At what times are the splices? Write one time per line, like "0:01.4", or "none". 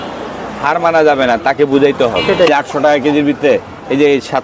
0:02.5

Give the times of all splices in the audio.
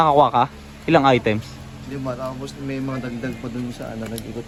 none

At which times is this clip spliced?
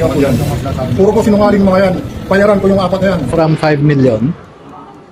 0:03.3

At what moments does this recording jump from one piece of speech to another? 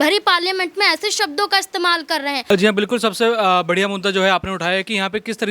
0:02.4

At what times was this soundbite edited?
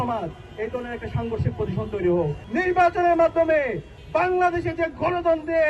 0:02.4

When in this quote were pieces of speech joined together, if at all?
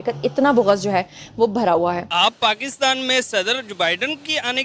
0:02.1

